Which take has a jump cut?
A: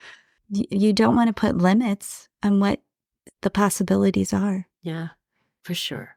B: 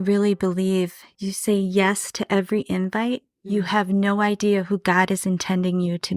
B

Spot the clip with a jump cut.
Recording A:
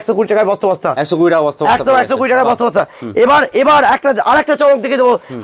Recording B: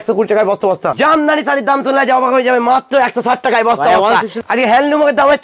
B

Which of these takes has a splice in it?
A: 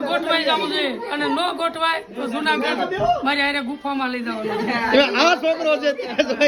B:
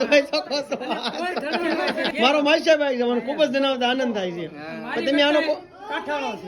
B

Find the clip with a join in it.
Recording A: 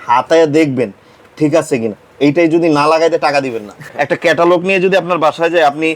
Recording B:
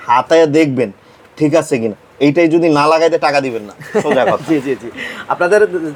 A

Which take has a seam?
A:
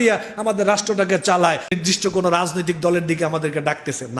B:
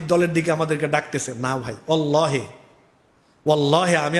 A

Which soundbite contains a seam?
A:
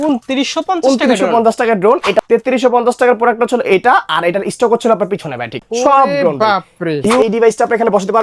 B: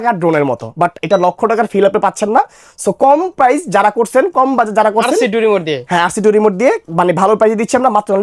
A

